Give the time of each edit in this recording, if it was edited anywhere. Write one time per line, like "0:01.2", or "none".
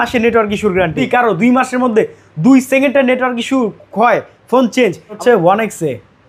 0:01.0
0:05.2